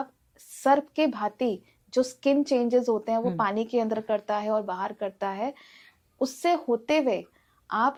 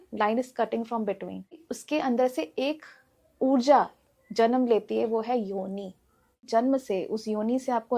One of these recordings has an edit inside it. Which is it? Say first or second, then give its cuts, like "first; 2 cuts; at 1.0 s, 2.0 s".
second; 2 cuts; at 1.6 s, 6.5 s